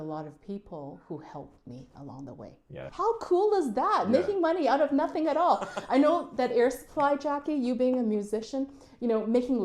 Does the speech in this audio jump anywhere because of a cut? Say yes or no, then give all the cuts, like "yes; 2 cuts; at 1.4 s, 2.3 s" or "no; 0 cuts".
yes; 1 cut; at 2.9 s